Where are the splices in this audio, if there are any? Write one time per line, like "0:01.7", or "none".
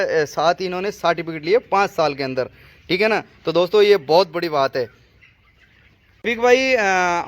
0:06.2